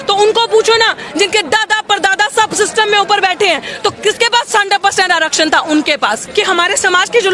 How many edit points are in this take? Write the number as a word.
one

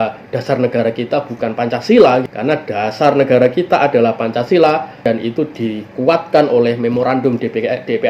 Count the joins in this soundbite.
two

